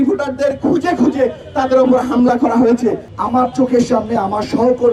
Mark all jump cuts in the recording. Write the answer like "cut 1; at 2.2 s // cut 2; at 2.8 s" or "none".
none